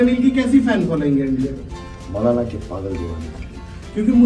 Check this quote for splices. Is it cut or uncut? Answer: uncut